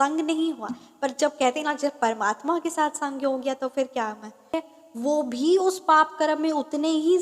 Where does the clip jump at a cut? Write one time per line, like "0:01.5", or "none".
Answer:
0:04.5